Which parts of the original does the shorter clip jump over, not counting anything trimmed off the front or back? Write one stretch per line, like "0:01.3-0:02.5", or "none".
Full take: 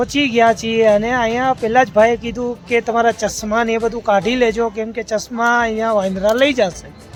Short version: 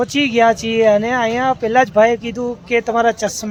none